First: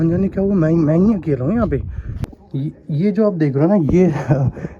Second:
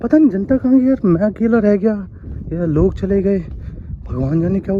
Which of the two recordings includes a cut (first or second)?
first